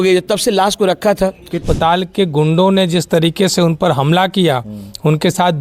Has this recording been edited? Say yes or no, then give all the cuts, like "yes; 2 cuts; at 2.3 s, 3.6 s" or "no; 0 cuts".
yes; 1 cut; at 1.6 s